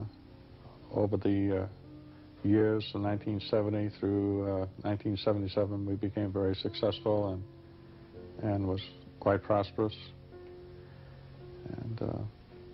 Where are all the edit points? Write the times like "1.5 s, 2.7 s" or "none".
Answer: 11.5 s